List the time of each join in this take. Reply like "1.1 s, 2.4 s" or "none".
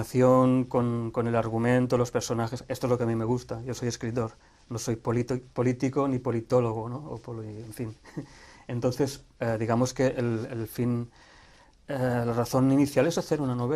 2.1 s